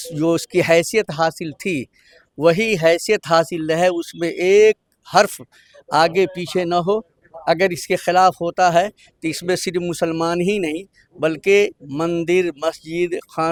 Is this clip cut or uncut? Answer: uncut